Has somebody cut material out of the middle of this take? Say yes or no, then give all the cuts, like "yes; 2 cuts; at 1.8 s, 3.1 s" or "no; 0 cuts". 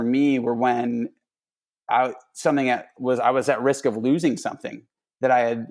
no; 0 cuts